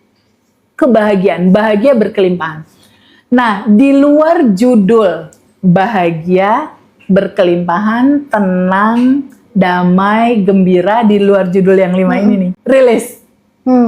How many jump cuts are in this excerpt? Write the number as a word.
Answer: one